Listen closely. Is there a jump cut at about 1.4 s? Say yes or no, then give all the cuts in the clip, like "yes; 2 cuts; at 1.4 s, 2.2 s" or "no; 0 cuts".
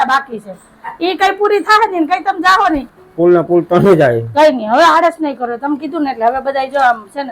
no; 1 cut; at 3.0 s